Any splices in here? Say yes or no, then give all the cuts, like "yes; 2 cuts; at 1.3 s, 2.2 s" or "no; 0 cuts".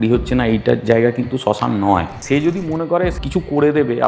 yes; 2 cuts; at 2.1 s, 3.2 s